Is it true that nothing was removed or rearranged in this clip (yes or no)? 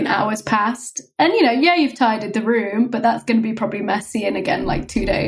yes